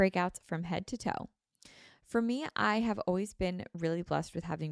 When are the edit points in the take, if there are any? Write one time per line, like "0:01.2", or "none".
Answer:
none